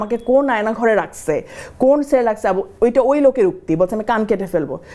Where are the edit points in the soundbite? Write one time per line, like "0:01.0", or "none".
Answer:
none